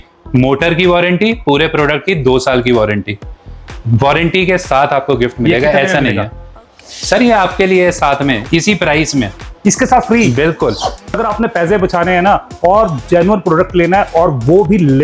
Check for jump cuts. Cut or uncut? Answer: cut